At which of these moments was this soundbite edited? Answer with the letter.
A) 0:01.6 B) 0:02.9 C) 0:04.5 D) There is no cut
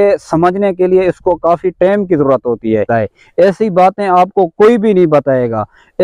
B